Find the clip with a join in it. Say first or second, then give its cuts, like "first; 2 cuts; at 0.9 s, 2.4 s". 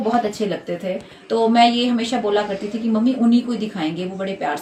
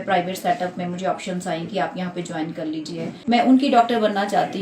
second; 1 cut; at 3.2 s